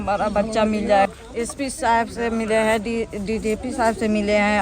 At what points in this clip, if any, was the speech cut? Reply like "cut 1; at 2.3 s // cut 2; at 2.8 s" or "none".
cut 1; at 1.1 s